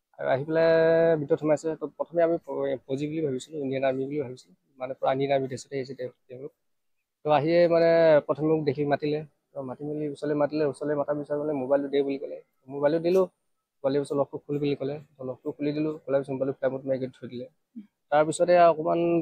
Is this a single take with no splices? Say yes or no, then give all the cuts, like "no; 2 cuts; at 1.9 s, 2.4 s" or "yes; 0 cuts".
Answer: yes; 0 cuts